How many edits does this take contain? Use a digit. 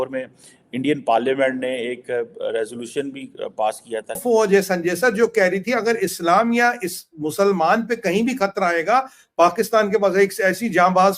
1